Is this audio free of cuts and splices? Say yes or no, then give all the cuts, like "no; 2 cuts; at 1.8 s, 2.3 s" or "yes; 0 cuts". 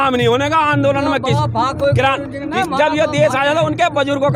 yes; 0 cuts